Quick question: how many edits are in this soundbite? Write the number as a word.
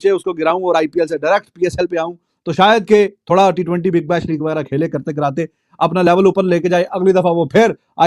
zero